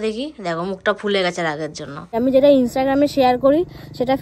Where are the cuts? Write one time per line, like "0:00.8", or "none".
0:02.2